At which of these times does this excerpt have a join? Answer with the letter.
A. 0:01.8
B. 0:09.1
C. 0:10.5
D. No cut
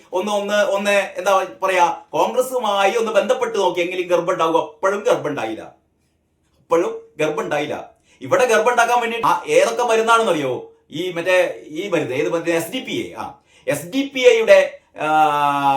B